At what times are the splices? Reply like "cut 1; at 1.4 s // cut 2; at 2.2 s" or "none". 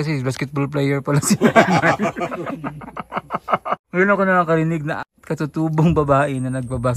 cut 1; at 3.5 s // cut 2; at 4.9 s